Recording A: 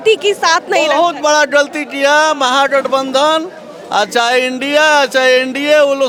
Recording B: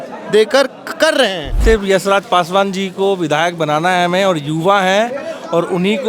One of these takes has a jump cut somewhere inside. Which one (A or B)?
B